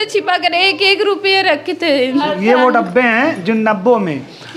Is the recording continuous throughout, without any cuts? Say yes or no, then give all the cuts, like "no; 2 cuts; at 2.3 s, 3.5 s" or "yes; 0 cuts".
no; 1 cut; at 2.2 s